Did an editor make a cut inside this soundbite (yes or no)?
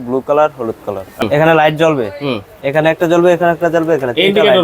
yes